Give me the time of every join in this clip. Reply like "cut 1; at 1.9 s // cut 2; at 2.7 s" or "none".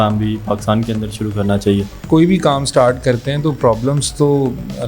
cut 1; at 2.1 s